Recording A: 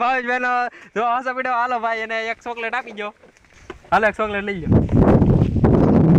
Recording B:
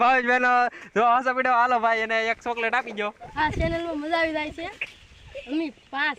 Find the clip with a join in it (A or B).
B